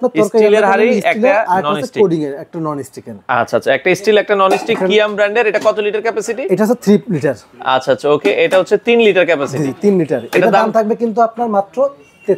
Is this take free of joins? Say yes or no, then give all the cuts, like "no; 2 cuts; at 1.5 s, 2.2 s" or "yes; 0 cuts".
yes; 0 cuts